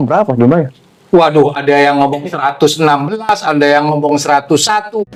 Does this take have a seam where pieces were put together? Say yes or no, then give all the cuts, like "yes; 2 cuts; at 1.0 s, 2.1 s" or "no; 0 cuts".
no; 0 cuts